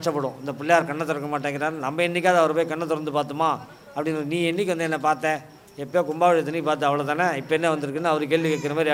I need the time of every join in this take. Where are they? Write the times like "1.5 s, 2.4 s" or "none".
none